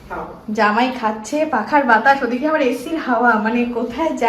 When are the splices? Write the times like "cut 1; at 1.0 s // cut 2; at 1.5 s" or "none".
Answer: none